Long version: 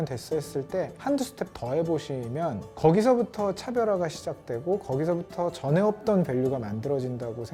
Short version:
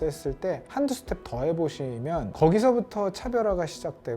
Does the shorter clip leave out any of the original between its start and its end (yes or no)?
yes